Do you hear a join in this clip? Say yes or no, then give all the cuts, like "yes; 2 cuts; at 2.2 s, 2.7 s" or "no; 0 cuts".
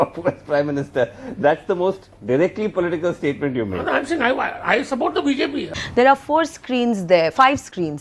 yes; 1 cut; at 5.8 s